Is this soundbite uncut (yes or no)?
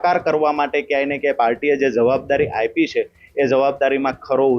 yes